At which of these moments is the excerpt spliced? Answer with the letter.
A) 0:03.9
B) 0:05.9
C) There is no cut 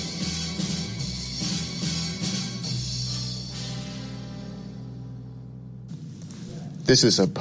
B